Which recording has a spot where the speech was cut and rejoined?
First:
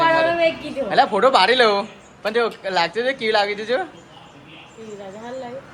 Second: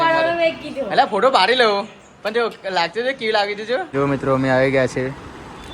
second; 1 cut; at 3.9 s

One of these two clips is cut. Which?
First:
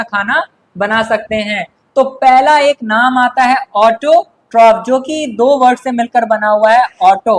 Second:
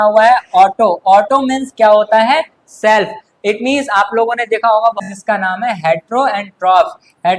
second; 1 cut; at 5.0 s

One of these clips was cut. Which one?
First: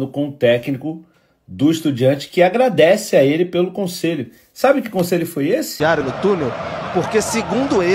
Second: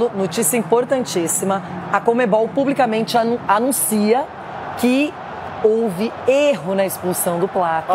first; 1 cut; at 5.7 s

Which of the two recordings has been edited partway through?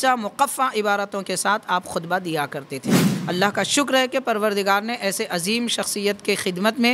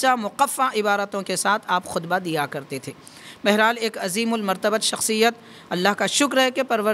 first; 1 cut; at 3.1 s

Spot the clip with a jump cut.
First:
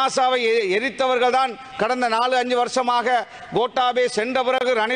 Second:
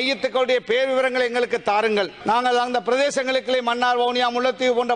second; 1 cut; at 2.2 s

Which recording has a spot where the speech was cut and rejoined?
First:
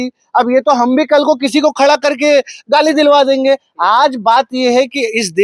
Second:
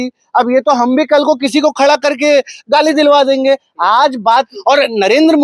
second; 1 cut; at 4.5 s

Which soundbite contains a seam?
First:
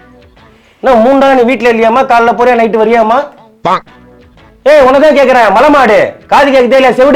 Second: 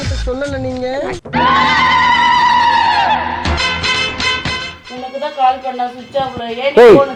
second; 1 cut; at 1.2 s

